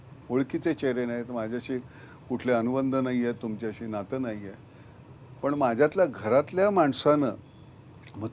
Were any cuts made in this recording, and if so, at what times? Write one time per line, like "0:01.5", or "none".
none